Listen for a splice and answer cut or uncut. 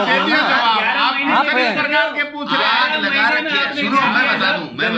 uncut